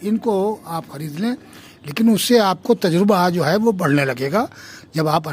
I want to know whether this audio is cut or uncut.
cut